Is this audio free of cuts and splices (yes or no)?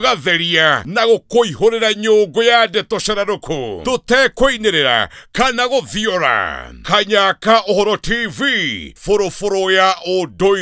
yes